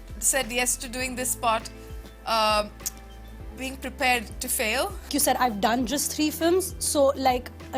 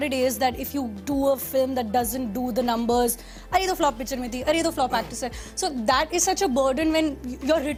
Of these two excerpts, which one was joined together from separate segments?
first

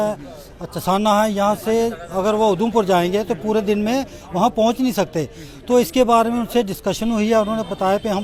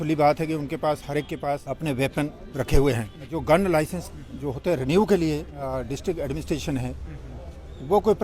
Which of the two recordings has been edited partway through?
second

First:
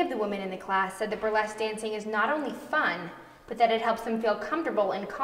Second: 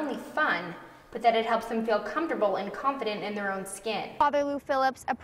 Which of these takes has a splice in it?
second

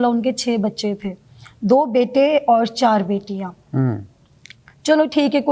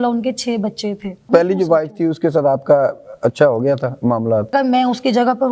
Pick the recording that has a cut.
second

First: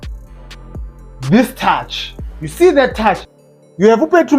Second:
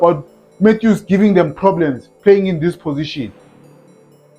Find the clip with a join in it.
first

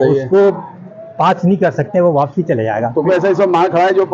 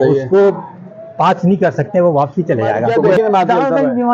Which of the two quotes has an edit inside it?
second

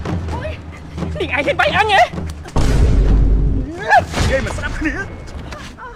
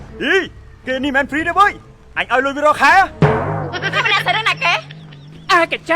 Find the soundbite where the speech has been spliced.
second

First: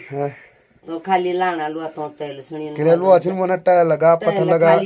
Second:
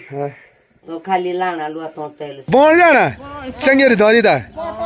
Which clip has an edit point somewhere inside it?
second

